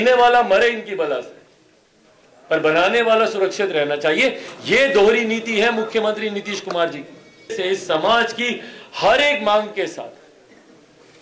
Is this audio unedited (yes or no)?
no